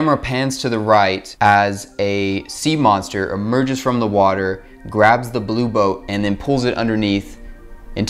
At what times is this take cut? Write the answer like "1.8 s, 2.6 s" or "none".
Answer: 1.3 s